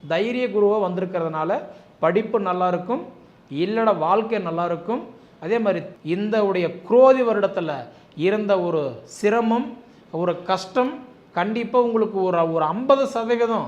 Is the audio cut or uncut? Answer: cut